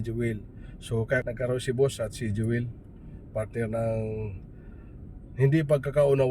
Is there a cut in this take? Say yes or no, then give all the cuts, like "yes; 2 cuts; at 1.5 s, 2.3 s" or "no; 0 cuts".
yes; 1 cut; at 1.2 s